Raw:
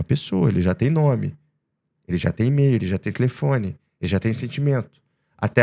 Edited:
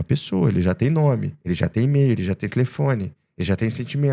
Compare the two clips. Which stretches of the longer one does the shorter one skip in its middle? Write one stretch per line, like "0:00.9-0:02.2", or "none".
0:01.3-0:02.0